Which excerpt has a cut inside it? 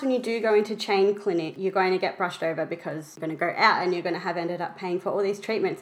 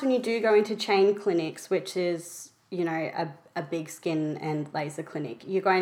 first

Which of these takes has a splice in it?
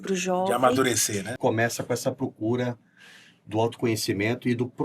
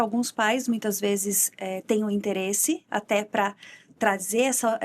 first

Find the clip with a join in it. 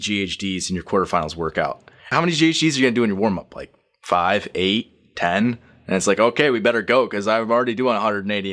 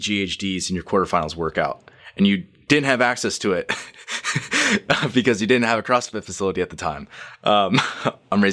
first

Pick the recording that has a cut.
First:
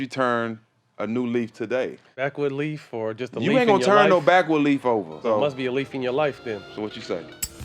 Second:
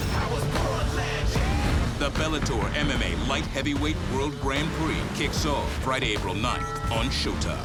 first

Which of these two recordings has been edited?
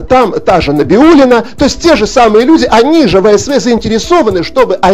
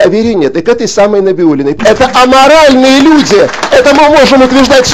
second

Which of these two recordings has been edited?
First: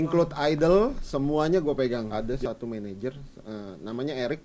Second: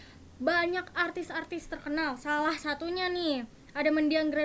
first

